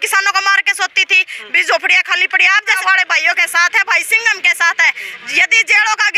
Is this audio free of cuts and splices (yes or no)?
no